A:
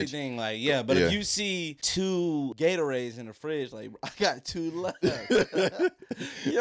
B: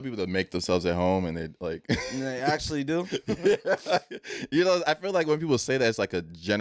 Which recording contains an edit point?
A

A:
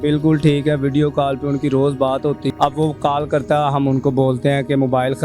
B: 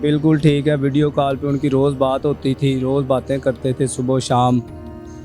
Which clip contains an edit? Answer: A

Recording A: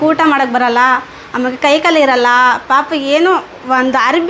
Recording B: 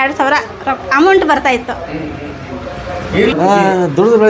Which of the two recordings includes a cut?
B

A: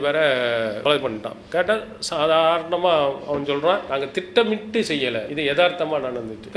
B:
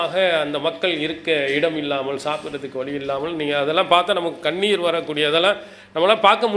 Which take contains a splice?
A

